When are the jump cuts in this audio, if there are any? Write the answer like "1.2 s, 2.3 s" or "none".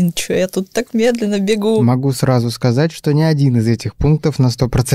1.8 s